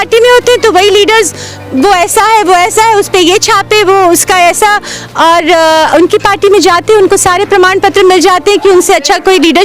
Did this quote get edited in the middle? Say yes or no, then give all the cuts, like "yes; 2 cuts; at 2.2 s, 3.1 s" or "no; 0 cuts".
no; 0 cuts